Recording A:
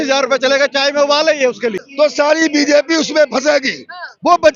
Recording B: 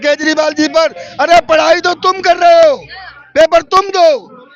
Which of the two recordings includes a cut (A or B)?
A